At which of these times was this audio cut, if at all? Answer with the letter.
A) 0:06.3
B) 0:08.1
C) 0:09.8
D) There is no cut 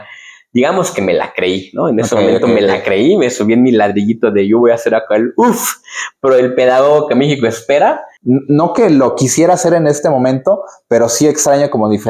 B